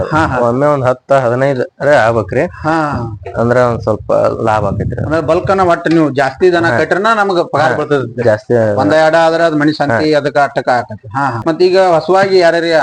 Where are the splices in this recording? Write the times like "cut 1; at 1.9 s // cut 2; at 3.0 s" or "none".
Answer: cut 1; at 11.6 s

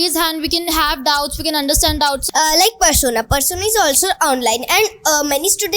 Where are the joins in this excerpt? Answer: cut 1; at 2.2 s

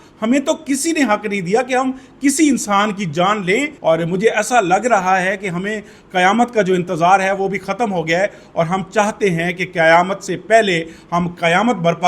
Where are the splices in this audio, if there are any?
cut 1; at 3.7 s

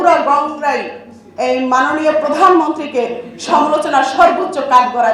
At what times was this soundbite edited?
none

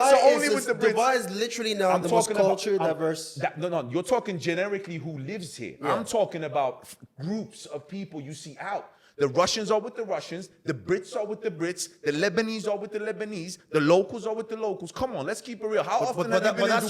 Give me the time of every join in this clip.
none

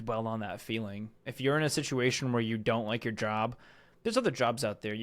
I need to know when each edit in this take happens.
none

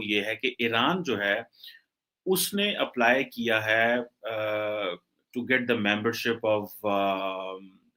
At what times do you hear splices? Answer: none

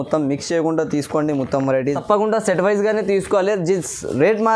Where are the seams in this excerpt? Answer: cut 1; at 2.0 s

